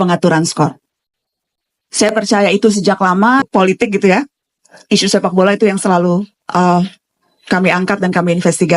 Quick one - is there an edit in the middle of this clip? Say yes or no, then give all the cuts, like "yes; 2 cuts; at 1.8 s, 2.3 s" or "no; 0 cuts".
yes; 1 cut; at 3.5 s